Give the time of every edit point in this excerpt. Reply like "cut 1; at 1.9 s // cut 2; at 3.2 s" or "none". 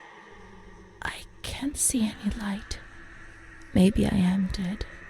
cut 1; at 1.0 s